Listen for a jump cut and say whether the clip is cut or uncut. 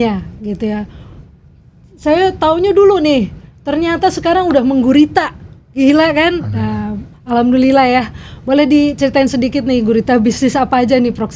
uncut